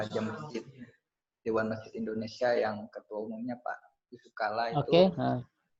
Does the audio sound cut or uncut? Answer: uncut